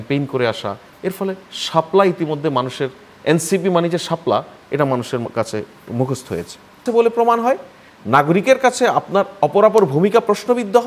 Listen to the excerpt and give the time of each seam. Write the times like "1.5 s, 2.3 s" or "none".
6.8 s